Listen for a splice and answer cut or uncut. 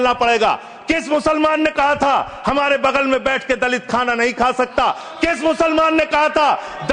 uncut